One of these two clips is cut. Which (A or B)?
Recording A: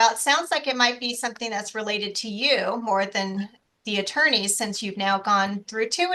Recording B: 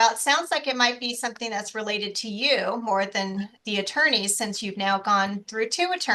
B